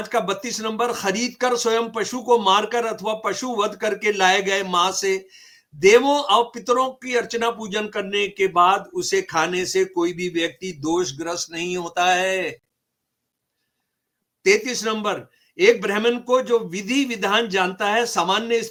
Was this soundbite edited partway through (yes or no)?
no